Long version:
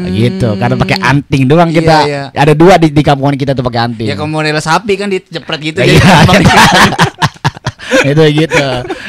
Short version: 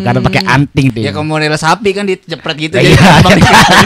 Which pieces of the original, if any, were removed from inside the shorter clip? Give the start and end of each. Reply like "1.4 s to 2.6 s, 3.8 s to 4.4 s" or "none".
1.5 s to 3.9 s